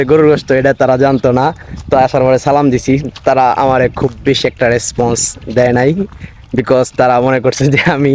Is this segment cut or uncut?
uncut